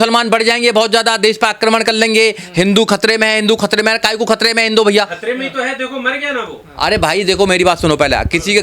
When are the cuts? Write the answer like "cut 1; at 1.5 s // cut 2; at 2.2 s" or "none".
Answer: none

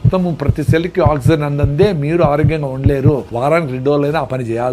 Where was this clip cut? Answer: cut 1; at 3.3 s

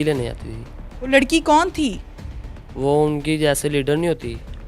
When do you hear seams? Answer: none

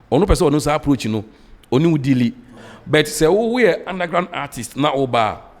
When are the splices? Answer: cut 1; at 2.6 s

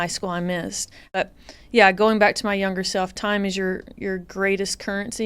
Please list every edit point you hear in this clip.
cut 1; at 1.2 s

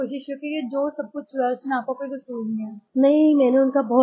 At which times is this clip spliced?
cut 1; at 2.8 s

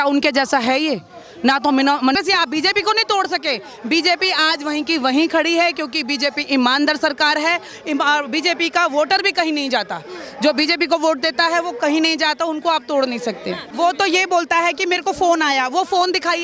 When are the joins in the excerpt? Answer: cut 1; at 2.2 s // cut 2; at 13.7 s

